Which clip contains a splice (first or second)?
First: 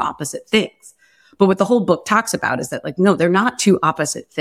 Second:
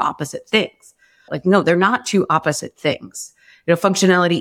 second